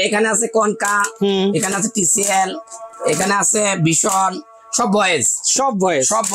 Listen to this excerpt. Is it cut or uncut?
uncut